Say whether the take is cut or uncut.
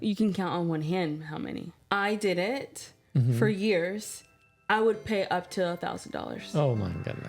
cut